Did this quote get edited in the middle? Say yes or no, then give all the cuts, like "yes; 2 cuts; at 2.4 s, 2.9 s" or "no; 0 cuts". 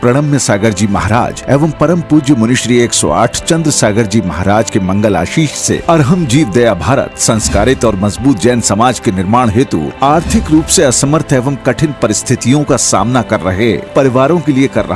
no; 0 cuts